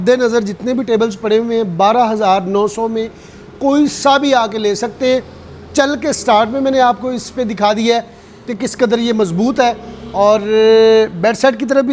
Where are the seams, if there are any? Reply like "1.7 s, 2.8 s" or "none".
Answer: none

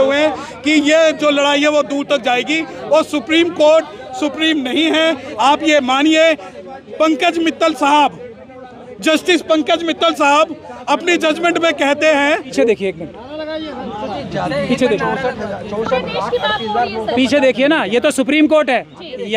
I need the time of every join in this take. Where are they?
12.5 s

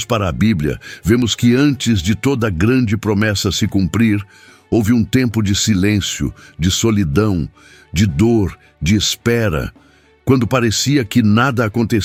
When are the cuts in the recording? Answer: none

